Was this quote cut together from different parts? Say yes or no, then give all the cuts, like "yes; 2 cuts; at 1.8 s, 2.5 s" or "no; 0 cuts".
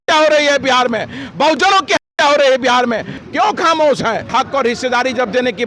yes; 2 cuts; at 3.2 s, 4.3 s